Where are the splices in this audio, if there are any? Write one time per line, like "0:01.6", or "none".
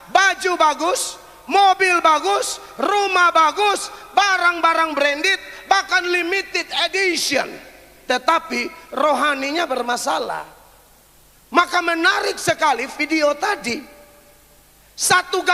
none